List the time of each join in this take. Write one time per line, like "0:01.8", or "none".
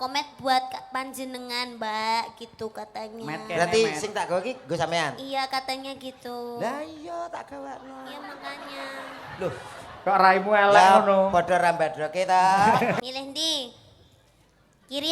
0:13.0